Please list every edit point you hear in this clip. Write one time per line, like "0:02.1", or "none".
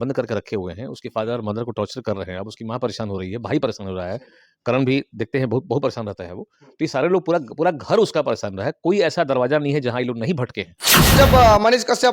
0:11.1